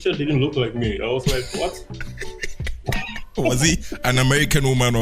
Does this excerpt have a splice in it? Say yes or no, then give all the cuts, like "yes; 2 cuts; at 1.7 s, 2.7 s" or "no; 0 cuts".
no; 0 cuts